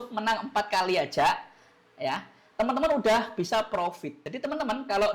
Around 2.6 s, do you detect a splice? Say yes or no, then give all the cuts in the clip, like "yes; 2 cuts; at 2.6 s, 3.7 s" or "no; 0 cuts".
no; 1 cut; at 4.2 s